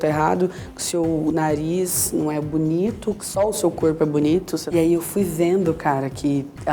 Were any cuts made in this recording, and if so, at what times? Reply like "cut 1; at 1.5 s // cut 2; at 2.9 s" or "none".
cut 1; at 3.2 s // cut 2; at 4.5 s